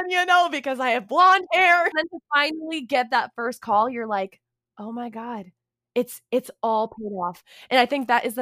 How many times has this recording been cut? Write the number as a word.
one